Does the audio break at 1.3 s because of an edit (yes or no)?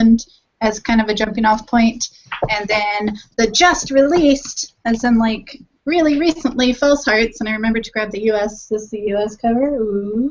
no